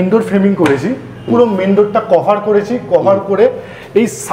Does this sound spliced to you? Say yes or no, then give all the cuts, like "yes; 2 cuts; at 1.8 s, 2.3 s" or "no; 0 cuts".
no; 0 cuts